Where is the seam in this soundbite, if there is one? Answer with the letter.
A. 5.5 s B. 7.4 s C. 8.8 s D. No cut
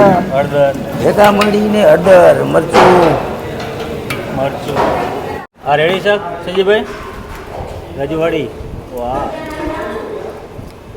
A